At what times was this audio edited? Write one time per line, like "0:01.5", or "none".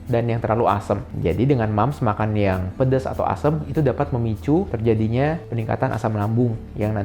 0:01.1